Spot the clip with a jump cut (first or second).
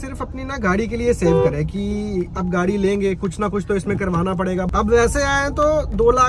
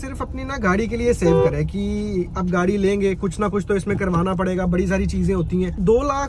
first